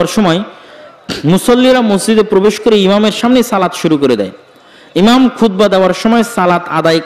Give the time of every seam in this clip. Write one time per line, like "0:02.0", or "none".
none